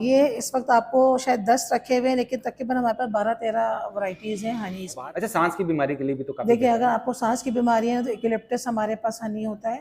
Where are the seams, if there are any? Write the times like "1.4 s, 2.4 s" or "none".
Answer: 5.0 s